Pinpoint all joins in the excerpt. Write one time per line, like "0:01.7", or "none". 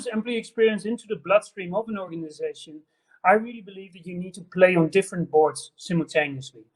none